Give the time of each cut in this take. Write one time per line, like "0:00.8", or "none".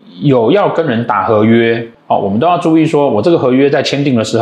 0:01.9